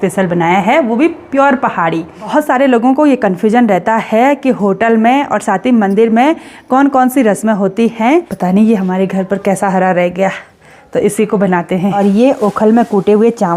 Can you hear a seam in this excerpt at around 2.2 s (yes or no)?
yes